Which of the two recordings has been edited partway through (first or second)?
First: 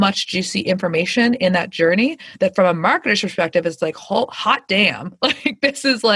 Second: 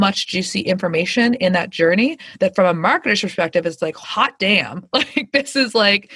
second